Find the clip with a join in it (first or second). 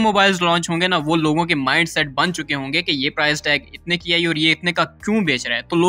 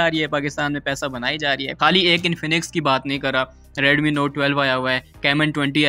second